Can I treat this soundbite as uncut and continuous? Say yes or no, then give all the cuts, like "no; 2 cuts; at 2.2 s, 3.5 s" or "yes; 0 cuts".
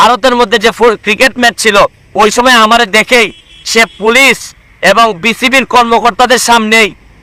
yes; 0 cuts